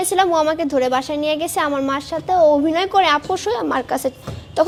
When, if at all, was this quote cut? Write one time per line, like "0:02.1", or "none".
none